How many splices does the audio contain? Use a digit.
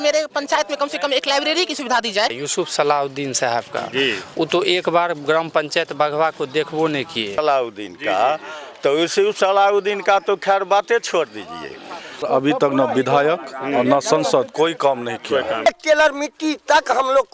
4